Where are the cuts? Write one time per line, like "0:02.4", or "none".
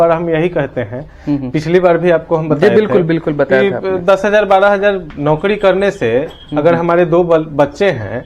none